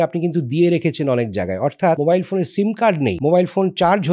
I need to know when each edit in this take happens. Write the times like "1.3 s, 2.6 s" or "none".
2.0 s, 3.2 s